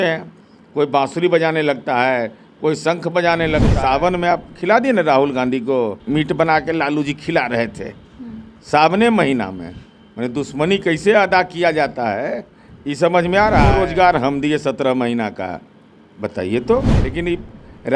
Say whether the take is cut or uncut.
cut